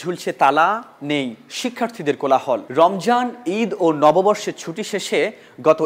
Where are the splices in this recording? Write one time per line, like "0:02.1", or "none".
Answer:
0:02.7